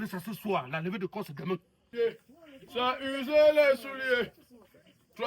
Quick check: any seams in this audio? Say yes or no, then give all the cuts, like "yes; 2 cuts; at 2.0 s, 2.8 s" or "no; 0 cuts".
yes; 1 cut; at 1.8 s